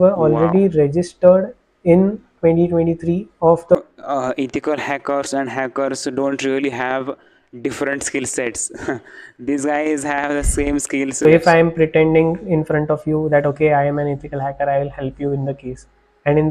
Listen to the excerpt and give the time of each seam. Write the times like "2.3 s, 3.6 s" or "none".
3.8 s, 11.2 s